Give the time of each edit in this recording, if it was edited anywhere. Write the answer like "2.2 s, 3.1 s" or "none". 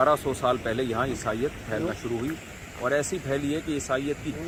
none